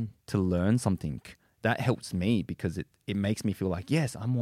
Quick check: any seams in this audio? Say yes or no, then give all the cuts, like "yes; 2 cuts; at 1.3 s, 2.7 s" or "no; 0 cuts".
yes; 1 cut; at 1.6 s